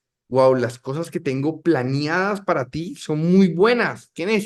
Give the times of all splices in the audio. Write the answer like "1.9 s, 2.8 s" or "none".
none